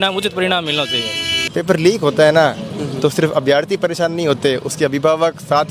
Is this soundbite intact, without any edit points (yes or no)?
no